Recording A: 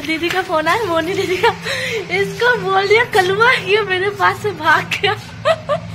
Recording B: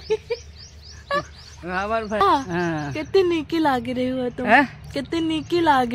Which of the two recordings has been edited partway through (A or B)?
B